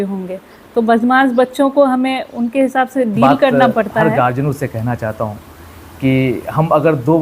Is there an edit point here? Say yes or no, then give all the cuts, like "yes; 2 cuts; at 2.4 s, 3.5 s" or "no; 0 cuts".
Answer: yes; 1 cut; at 4.0 s